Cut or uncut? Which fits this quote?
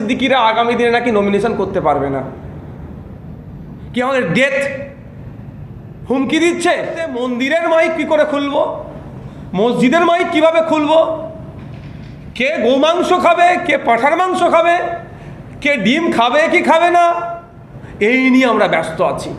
cut